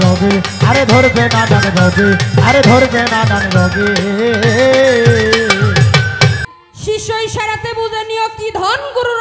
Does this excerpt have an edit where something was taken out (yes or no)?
yes